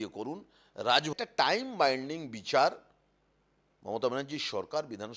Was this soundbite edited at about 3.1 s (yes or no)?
no